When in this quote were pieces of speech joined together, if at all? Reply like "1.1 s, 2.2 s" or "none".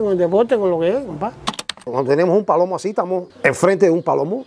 1.9 s, 3.3 s